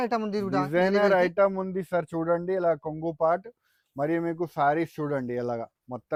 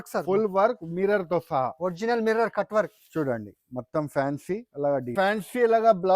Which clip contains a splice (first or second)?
second